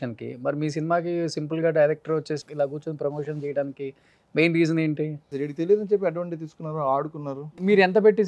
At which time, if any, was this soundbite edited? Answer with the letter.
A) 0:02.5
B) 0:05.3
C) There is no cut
B